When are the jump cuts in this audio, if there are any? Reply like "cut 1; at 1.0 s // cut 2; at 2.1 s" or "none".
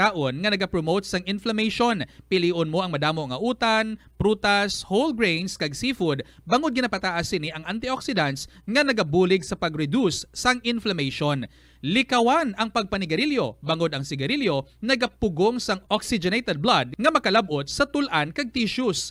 none